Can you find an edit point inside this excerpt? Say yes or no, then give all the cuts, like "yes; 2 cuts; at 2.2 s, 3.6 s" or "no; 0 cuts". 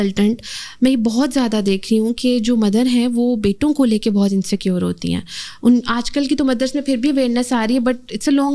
no; 0 cuts